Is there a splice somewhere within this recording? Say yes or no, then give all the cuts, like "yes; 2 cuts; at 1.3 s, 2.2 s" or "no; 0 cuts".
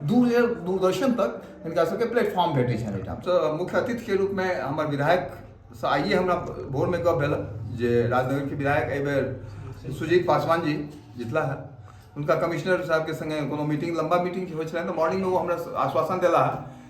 yes; 1 cut; at 3.2 s